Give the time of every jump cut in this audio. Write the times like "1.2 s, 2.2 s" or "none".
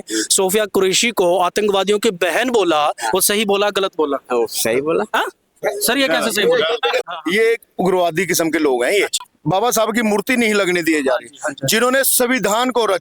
7.0 s, 9.2 s